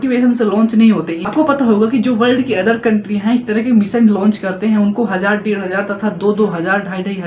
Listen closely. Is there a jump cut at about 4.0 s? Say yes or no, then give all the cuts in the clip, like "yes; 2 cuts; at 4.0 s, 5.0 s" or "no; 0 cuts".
no; 1 cut; at 1.2 s